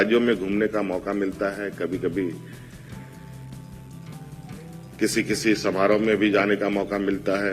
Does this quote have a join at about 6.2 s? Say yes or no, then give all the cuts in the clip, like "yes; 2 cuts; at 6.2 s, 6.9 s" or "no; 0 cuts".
no; 2 cuts; at 2.9 s, 5.0 s